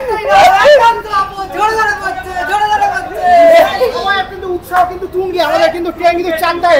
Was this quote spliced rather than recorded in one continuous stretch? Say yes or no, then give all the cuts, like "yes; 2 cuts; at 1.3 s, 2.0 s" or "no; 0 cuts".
no; 0 cuts